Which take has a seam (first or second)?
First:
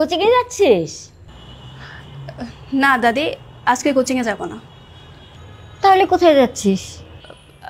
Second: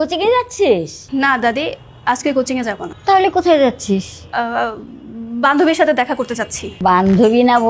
second